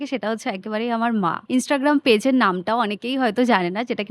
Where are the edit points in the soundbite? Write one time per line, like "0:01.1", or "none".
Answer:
0:01.4